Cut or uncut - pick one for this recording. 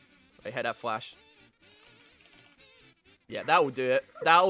uncut